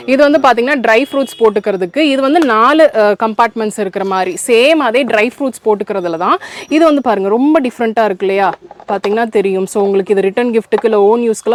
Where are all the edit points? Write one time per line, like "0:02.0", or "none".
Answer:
none

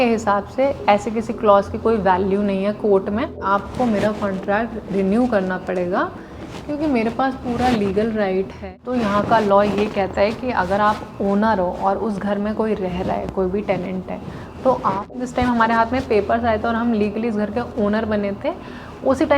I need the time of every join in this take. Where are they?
0:03.4
0:08.6
0:15.2

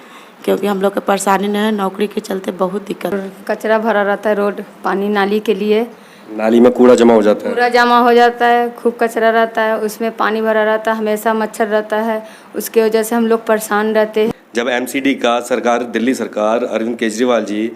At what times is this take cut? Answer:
0:03.1
0:14.3

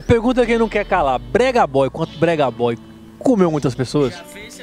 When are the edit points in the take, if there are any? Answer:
none

